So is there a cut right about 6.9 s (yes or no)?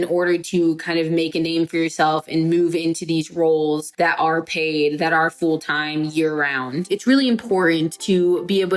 yes